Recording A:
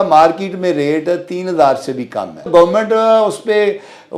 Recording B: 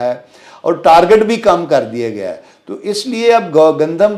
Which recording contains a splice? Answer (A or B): A